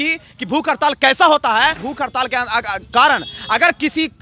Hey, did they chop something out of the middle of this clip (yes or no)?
yes